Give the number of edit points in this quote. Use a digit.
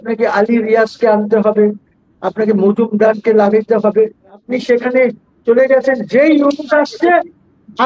1